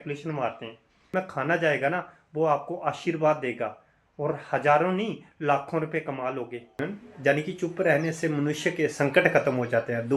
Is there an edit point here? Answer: yes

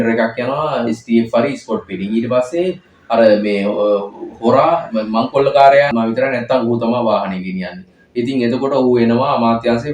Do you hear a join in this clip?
yes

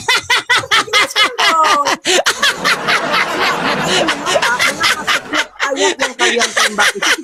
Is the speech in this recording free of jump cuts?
yes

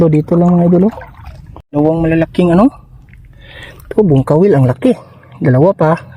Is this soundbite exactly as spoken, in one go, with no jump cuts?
no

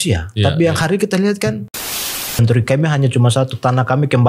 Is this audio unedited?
no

